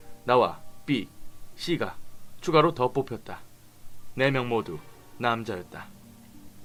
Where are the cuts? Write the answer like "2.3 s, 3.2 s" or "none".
none